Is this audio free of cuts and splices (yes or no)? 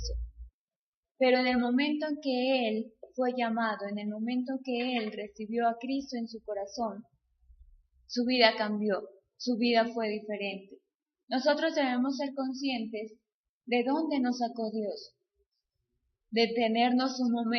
yes